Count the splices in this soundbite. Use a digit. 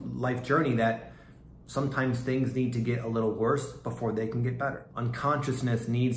1